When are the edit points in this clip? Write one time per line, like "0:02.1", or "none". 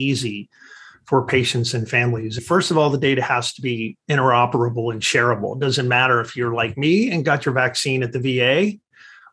0:02.4